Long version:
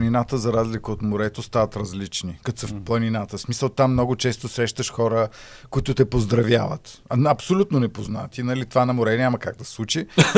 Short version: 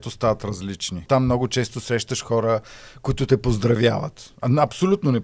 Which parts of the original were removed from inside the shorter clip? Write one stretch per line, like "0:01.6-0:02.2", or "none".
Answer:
0:02.4-0:03.7